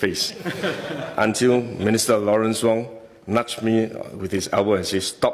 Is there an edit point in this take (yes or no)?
no